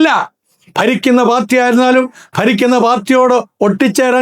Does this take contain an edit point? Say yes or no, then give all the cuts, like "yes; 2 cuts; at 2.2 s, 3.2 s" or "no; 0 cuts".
no; 0 cuts